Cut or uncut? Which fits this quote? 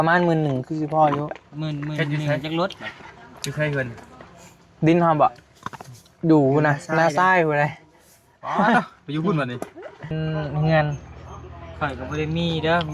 cut